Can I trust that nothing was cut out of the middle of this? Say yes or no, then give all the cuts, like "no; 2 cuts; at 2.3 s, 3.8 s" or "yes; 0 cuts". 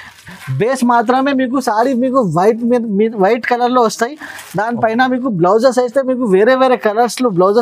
yes; 0 cuts